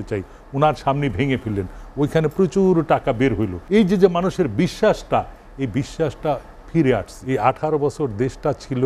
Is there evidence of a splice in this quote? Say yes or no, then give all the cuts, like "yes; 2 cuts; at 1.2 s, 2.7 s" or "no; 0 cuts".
yes; 2 cuts; at 3.5 s, 7.1 s